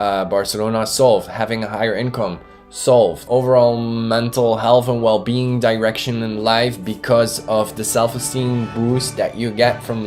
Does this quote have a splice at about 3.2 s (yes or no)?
yes